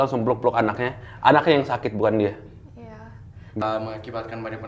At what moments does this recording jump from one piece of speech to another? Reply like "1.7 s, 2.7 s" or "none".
3.6 s